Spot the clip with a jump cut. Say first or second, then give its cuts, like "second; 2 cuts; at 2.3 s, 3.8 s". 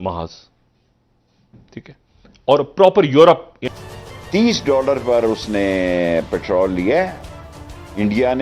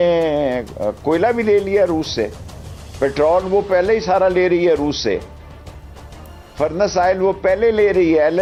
first; 1 cut; at 3.6 s